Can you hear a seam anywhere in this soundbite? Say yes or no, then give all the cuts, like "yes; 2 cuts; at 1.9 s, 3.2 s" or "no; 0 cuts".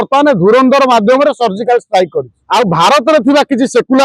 yes; 1 cut; at 2.4 s